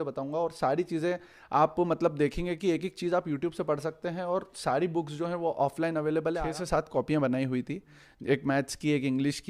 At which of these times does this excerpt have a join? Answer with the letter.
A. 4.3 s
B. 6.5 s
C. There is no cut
B